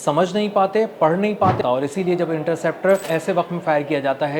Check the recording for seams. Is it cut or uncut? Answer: cut